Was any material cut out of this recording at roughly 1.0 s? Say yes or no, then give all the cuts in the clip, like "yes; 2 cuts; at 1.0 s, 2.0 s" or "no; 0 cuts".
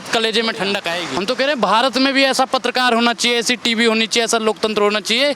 yes; 1 cut; at 1.0 s